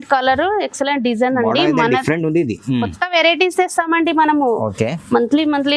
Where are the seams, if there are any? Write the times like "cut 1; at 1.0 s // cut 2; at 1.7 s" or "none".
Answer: none